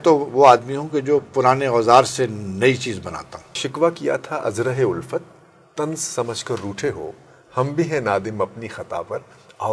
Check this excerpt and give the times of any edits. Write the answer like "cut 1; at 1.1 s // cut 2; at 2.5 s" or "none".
cut 1; at 3.6 s